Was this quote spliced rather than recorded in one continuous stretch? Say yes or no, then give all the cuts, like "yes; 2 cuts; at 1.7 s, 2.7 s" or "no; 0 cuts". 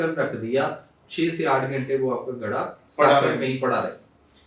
no; 0 cuts